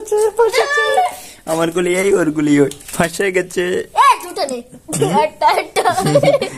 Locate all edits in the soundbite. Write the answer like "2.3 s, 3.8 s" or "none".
none